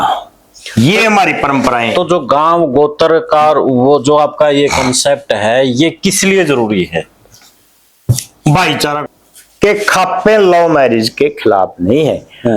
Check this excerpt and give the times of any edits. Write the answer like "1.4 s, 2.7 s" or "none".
9.0 s